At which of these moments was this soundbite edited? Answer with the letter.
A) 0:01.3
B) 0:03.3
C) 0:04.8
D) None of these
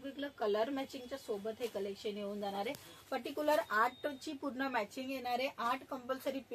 D